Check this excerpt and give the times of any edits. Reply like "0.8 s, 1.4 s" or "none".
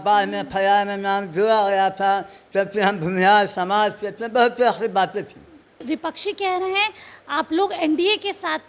5.8 s